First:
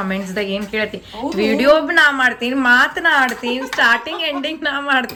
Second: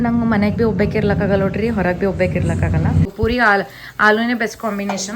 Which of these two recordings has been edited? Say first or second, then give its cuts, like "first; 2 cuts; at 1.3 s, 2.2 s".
second; 1 cut; at 3.1 s